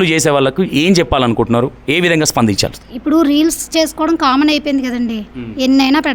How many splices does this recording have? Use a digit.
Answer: 1